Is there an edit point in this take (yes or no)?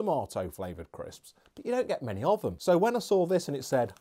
yes